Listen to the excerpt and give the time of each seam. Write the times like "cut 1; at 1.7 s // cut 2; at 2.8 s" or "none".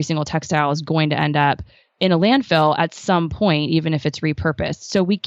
none